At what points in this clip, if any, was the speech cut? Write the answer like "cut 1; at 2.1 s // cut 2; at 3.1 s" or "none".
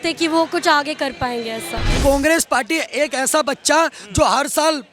cut 1; at 1.9 s